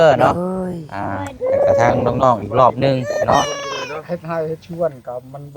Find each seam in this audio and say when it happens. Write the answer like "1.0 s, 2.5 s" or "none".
4.0 s